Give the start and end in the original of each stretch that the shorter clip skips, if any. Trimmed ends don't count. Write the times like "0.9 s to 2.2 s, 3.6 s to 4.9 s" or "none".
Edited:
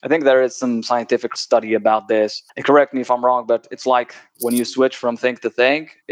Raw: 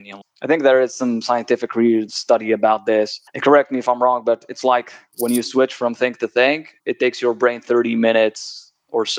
1.7 s to 2.1 s